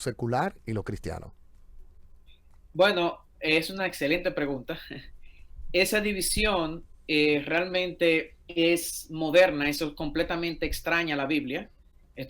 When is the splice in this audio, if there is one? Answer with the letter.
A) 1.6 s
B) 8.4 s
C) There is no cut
B